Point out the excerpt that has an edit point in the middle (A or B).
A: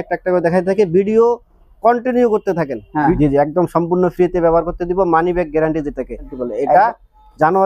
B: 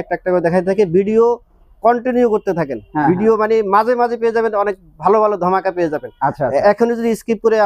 A